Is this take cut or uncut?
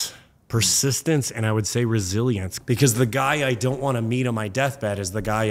cut